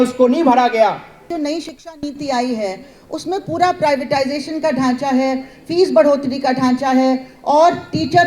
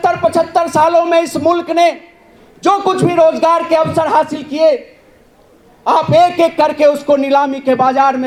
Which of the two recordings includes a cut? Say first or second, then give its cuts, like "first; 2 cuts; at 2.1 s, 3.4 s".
first; 1 cut; at 1.2 s